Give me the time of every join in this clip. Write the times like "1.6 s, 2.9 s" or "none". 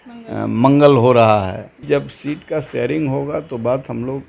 1.9 s

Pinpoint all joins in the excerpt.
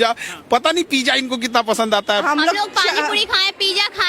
2.2 s

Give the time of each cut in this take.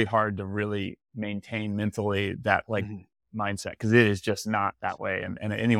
none

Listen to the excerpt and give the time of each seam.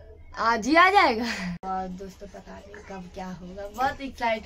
1.6 s

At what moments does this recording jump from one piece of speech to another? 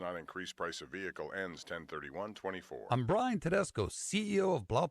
2.8 s

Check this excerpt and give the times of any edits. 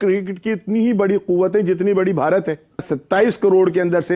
2.9 s

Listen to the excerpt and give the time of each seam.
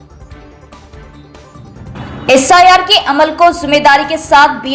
1.9 s

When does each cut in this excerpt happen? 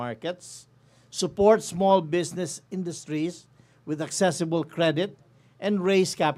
none

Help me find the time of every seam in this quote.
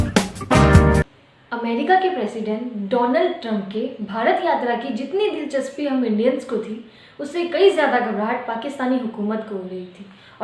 1.2 s

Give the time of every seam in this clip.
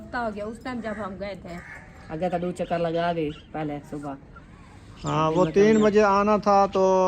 1.5 s, 3.4 s

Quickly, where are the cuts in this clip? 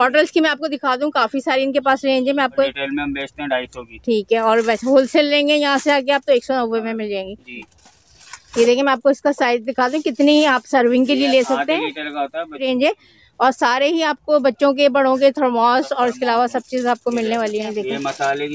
2.8 s, 7.6 s, 12.6 s, 17.7 s

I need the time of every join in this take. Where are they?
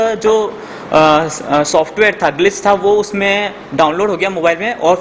none

